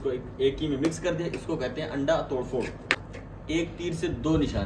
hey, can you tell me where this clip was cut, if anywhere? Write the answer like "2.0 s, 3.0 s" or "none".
3.0 s